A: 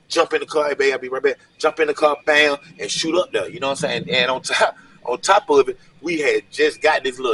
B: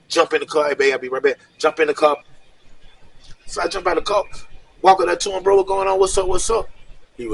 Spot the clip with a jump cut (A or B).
B